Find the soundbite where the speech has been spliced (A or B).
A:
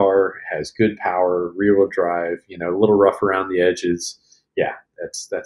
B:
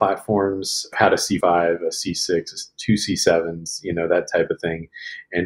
B